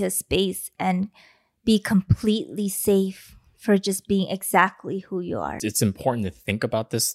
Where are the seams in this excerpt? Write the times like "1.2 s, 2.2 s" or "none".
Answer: 5.6 s